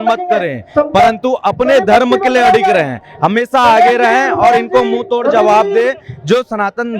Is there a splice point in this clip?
no; 0 cuts

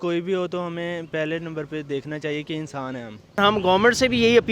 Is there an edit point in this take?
yes; 1 cut; at 3.3 s

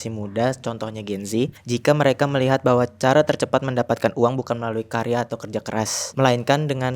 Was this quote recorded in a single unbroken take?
no; 2 cuts; at 1.6 s, 6.0 s

